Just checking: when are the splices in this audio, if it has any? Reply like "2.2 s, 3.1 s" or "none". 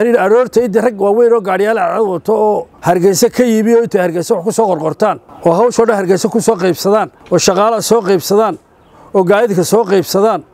2.7 s, 5.3 s, 7.2 s